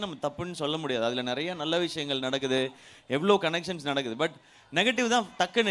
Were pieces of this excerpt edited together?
no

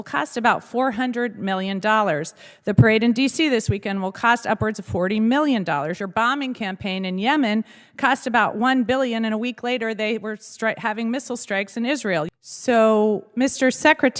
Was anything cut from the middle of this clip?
yes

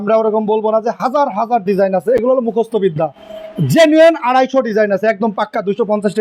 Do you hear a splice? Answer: no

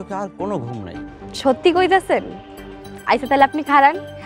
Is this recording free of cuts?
yes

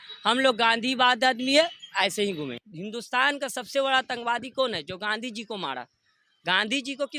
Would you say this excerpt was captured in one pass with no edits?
no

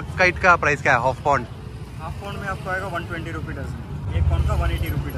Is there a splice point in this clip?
yes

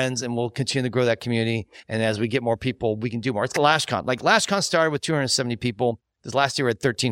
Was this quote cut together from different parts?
no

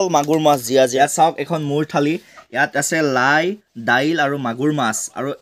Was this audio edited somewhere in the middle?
yes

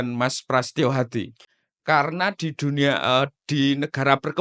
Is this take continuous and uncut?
no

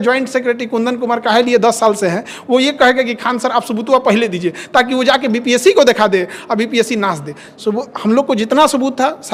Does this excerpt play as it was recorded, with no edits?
yes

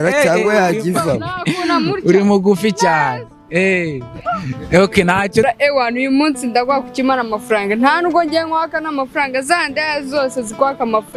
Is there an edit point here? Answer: yes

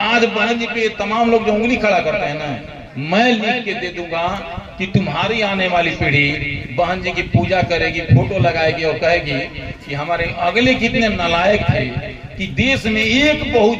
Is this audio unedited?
yes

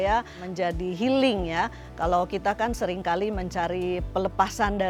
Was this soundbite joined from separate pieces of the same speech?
no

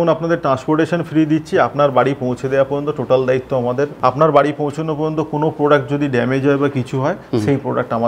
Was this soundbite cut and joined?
yes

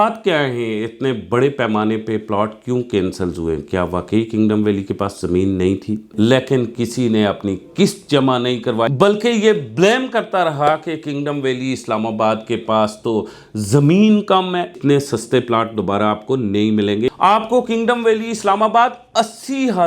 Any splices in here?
yes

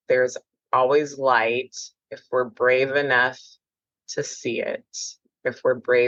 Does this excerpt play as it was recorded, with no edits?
yes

